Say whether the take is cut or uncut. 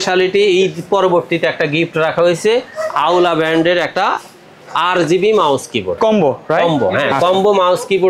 uncut